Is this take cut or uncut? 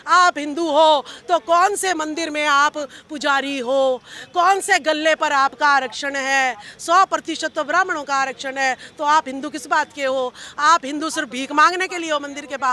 uncut